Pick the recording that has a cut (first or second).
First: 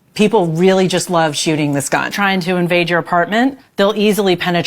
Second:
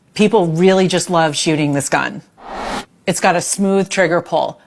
first